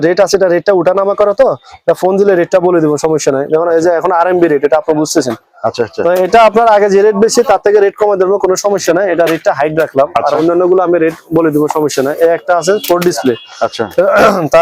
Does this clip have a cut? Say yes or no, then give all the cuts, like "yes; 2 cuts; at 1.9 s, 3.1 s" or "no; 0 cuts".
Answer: no; 0 cuts